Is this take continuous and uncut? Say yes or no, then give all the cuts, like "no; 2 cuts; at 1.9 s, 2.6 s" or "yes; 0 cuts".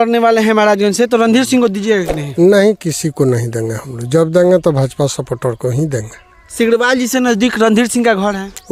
yes; 0 cuts